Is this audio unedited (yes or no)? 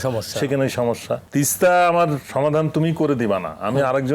no